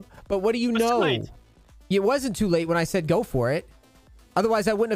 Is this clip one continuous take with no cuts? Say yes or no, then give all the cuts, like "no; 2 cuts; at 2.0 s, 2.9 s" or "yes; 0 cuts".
yes; 0 cuts